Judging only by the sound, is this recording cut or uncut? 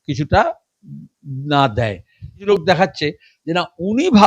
cut